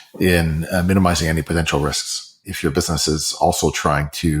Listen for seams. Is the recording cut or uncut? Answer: cut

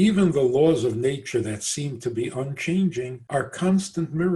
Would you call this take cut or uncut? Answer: cut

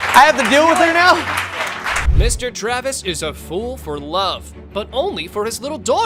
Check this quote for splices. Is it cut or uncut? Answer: uncut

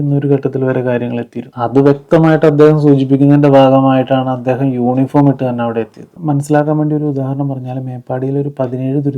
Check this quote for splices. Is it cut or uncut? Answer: cut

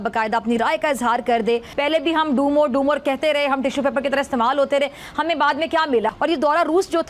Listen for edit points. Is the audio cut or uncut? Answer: cut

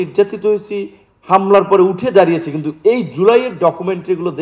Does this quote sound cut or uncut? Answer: uncut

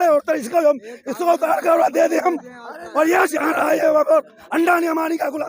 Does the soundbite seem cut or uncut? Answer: uncut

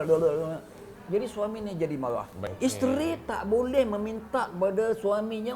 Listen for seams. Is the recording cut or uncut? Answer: cut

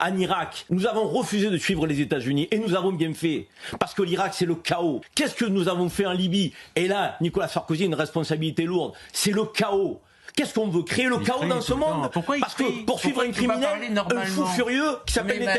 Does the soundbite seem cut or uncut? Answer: uncut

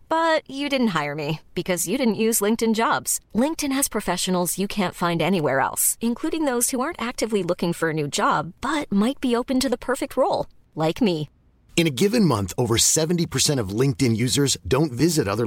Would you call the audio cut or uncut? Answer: uncut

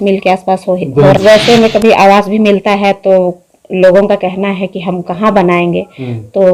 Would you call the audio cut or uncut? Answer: cut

